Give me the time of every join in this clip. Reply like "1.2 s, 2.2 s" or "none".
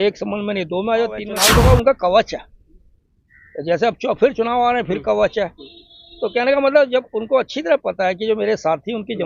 1.3 s